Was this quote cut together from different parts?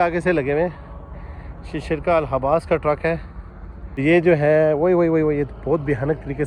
yes; 1 cut; at 4.0 s

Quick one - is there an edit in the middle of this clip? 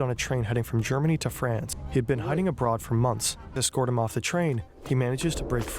yes; 2 cuts; at 1.7 s, 3.6 s

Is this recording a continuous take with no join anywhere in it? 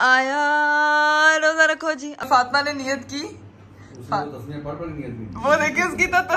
no; 1 cut; at 2.3 s

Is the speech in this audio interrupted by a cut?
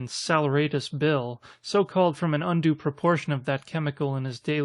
yes; 1 cut; at 3.5 s

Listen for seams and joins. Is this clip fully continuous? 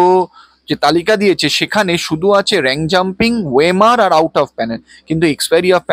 yes; 0 cuts

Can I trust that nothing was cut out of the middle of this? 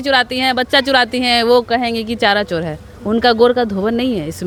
yes; 0 cuts

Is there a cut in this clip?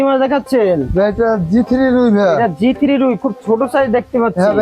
no; 0 cuts

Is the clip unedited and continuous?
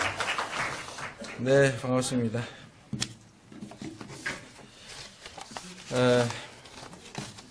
no; 1 cut; at 2.6 s

